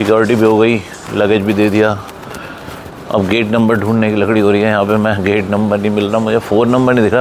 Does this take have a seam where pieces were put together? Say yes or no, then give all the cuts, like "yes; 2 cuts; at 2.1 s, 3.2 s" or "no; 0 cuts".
no; 0 cuts